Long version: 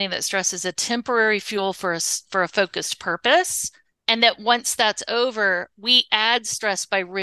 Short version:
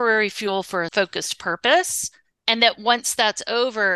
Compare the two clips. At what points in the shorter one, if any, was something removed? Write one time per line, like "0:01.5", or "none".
0:00.9